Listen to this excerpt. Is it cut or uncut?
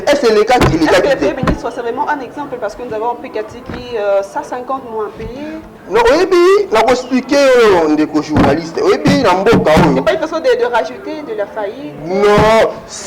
uncut